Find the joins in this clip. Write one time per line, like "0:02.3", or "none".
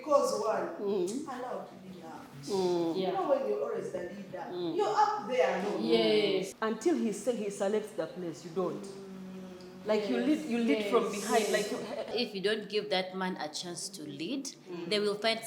0:06.5
0:12.1